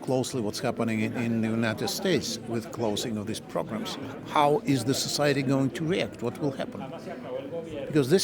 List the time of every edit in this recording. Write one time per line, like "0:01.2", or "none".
none